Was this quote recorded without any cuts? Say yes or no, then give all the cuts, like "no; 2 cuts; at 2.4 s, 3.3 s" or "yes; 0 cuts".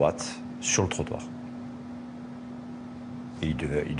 no; 1 cut; at 1.9 s